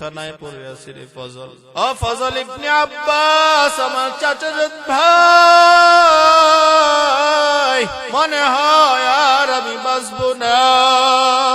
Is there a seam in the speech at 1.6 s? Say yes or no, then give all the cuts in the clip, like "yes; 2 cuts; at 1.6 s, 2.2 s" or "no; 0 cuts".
yes; 2 cuts; at 1.6 s, 8.0 s